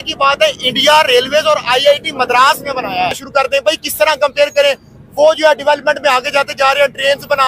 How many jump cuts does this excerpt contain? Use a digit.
1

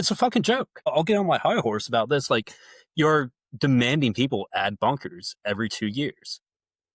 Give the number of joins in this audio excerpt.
1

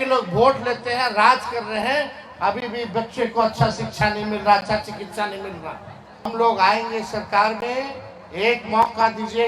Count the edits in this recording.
1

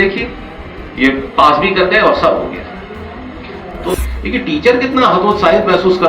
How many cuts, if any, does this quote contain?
1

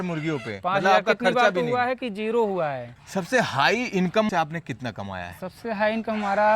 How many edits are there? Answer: 2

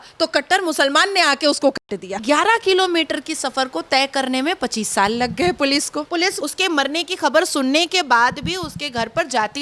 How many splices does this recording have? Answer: 2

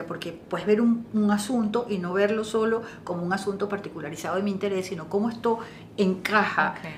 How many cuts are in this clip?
0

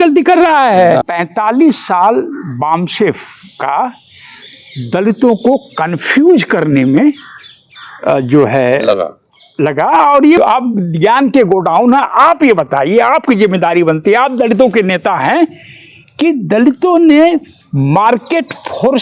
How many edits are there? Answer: 2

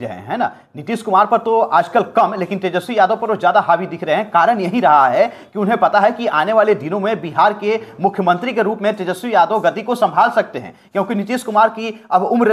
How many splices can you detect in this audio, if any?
0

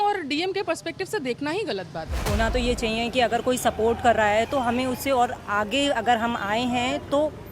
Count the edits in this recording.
1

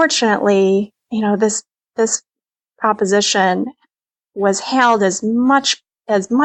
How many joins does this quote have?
1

